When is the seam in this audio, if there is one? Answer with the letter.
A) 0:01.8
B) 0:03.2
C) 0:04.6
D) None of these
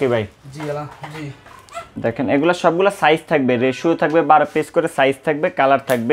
A